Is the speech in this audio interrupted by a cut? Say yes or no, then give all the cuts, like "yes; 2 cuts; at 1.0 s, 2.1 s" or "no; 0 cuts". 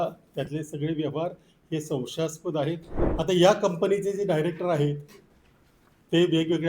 yes; 1 cut; at 3.0 s